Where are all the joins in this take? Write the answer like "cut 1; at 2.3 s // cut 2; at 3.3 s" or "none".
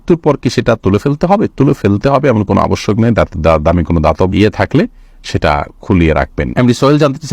none